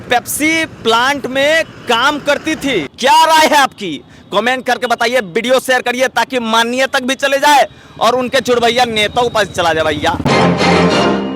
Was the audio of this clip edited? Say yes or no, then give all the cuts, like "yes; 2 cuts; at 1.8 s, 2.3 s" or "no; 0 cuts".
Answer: yes; 2 cuts; at 2.9 s, 10.2 s